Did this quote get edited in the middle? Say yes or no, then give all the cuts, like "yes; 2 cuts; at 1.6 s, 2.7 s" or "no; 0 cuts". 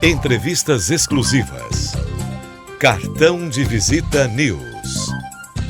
yes; 1 cut; at 4.7 s